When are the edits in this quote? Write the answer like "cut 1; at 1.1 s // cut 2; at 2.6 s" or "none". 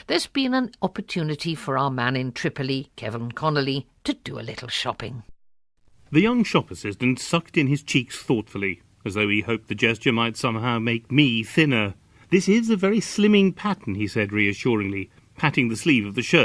none